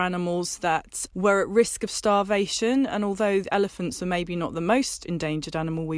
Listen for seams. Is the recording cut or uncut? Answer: cut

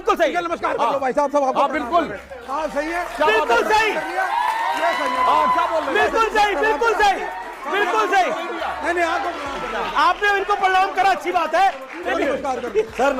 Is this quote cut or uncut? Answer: uncut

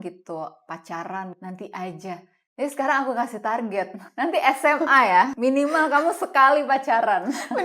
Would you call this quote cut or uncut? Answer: cut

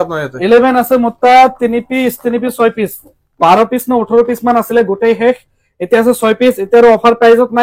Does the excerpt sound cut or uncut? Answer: uncut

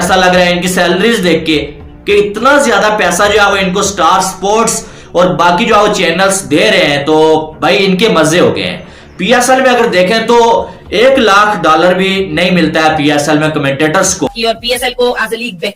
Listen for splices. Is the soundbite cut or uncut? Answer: uncut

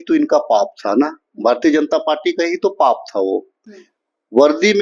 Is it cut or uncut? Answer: uncut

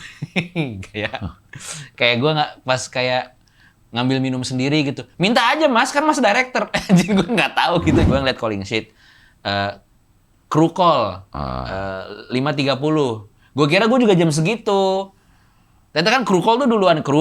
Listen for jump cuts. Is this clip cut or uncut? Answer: cut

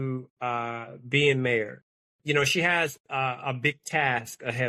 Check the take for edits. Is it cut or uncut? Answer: uncut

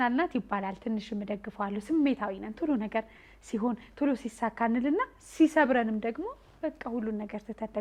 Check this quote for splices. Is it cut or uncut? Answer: uncut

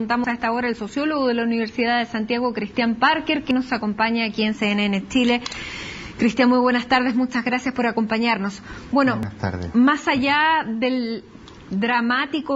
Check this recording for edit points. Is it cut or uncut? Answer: cut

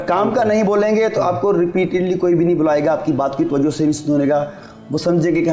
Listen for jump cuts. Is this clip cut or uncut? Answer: uncut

